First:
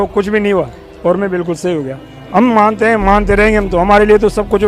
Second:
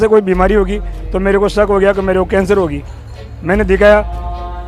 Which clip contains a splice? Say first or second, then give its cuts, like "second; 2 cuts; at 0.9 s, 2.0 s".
first; 1 cut; at 2.4 s